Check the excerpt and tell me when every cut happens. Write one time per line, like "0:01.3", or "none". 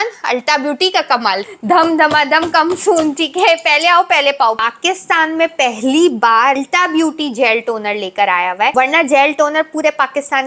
0:01.4
0:04.6
0:06.6
0:08.7